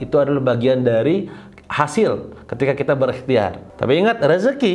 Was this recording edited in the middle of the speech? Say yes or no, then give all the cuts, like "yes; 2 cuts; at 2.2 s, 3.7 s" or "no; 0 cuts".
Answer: yes; 1 cut; at 3.6 s